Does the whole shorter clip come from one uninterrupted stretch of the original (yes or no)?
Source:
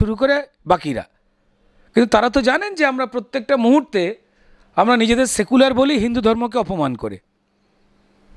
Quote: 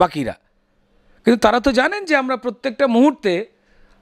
yes